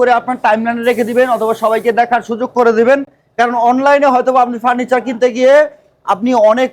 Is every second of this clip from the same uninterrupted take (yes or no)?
yes